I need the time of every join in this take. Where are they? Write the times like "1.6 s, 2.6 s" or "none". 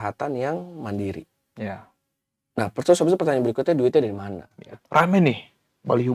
4.8 s